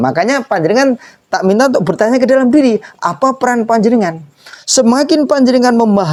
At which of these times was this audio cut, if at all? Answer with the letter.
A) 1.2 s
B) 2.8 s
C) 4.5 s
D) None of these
D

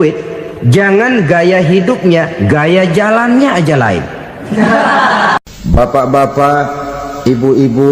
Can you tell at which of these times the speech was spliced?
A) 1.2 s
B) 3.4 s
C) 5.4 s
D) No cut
C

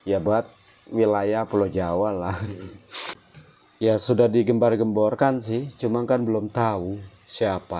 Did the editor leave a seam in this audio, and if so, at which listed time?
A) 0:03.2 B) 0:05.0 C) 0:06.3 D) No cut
A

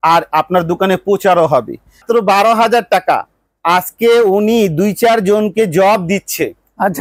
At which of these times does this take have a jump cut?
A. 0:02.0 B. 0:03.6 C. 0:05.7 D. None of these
A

